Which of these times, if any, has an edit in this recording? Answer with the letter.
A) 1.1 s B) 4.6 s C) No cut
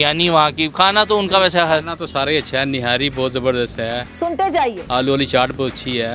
B